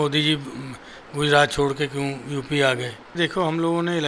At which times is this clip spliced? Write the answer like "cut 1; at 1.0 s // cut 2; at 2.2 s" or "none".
cut 1; at 3.2 s